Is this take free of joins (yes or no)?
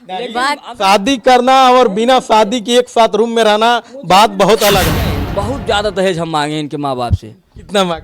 no